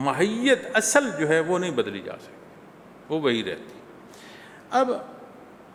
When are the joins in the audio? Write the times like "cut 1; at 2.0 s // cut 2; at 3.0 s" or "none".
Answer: none